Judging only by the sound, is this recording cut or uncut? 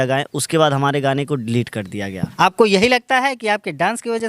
cut